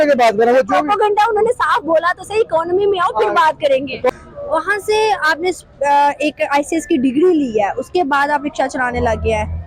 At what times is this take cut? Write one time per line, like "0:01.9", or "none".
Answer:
0:04.1